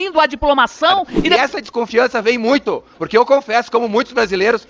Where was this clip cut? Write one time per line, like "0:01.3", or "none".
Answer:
0:01.4